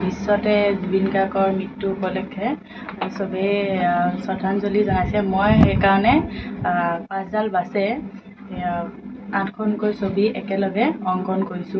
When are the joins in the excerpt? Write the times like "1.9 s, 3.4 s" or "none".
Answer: none